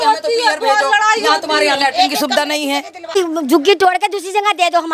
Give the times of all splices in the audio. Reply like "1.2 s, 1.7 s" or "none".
3.1 s